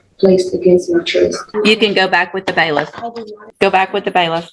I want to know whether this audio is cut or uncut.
cut